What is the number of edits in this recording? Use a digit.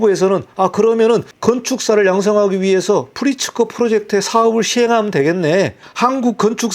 1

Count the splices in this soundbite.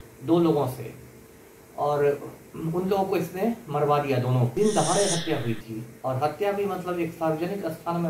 1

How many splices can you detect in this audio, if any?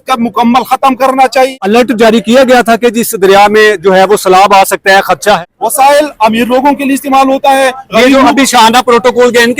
2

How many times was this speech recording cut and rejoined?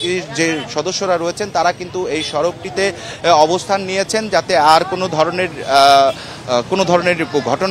0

